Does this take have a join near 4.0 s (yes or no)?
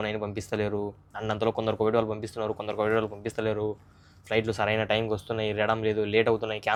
no